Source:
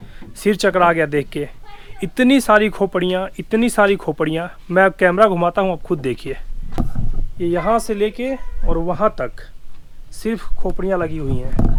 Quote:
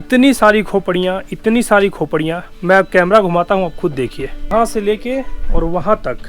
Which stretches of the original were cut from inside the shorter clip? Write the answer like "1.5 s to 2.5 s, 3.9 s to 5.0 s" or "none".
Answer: 6.6 s to 7.6 s